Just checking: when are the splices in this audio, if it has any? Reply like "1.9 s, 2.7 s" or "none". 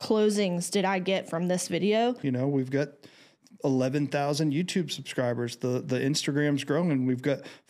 2.2 s